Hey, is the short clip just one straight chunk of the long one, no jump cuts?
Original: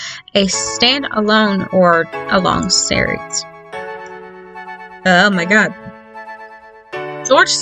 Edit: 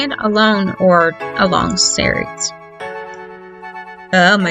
yes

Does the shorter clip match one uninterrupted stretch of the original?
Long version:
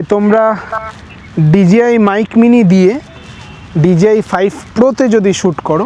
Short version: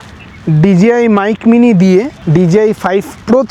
no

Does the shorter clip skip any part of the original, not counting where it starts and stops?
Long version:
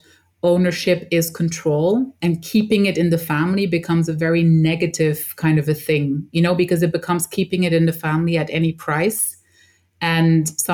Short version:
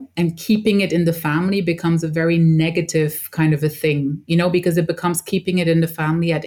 no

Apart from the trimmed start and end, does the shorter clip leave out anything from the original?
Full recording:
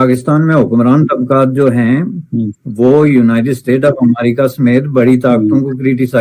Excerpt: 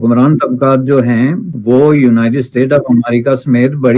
yes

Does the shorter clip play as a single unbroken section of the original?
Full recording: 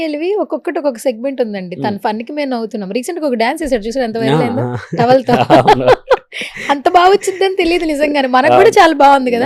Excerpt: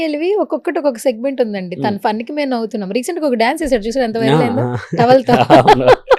yes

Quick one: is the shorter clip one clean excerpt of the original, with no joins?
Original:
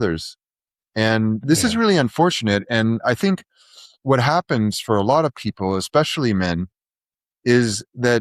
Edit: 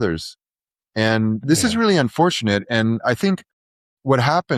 yes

